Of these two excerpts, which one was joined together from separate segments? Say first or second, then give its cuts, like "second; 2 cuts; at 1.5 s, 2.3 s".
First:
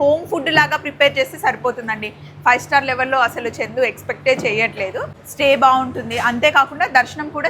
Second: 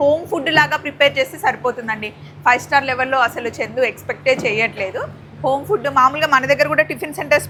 first; 1 cut; at 5.2 s